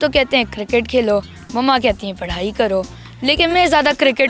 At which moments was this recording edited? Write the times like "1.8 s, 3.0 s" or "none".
none